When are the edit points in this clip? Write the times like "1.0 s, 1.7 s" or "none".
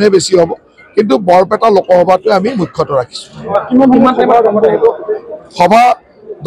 none